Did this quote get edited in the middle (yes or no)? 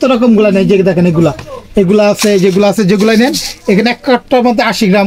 no